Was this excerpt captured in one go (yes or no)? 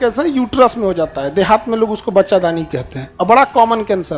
yes